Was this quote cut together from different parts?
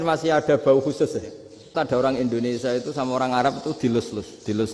yes; 1 cut; at 1.7 s

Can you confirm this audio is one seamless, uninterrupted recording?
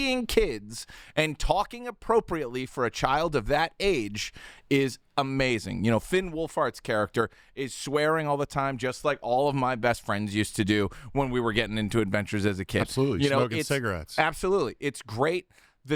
yes; 0 cuts

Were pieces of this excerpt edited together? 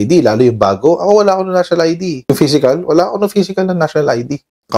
yes; 1 cut; at 2.2 s

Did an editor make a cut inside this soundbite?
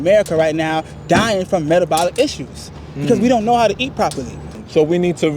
yes; 1 cut; at 4.4 s

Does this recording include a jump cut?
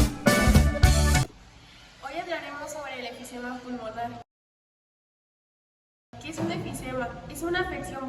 yes; 1 cut; at 1.2 s

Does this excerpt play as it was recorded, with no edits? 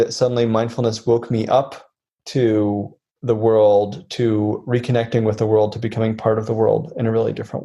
yes; 0 cuts

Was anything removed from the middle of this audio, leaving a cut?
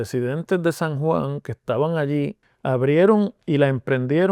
yes; 1 cut; at 2.5 s

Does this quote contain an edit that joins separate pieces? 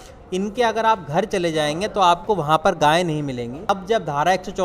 yes; 1 cut; at 3.7 s

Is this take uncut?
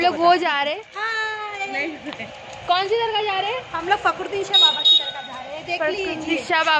yes; 0 cuts

